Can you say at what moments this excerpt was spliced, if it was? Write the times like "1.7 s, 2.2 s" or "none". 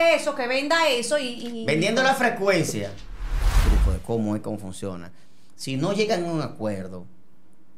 3.6 s